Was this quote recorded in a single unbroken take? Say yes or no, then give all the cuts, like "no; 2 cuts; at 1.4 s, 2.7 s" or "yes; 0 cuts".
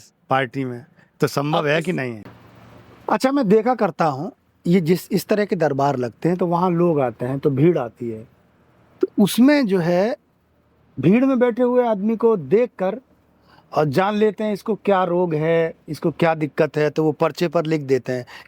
no; 1 cut; at 2.2 s